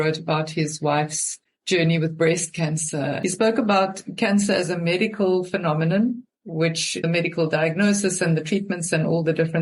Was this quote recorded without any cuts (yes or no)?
no